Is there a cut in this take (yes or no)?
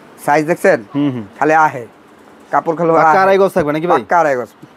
no